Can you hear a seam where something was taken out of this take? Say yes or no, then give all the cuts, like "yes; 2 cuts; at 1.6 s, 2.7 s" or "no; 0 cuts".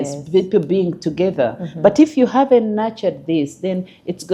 no; 0 cuts